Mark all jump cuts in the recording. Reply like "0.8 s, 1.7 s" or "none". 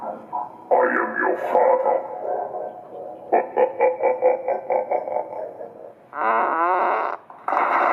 5.8 s